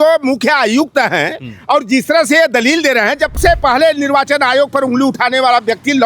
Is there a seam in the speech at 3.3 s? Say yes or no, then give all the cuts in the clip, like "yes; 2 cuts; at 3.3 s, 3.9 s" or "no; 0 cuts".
yes; 1 cut; at 3.3 s